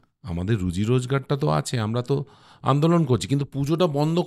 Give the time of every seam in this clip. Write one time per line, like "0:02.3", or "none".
none